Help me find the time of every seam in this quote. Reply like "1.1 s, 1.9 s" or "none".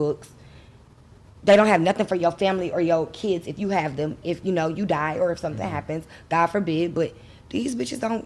none